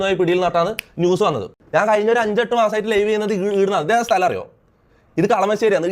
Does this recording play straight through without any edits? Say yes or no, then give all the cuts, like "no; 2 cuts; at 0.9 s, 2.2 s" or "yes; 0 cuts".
no; 1 cut; at 1.5 s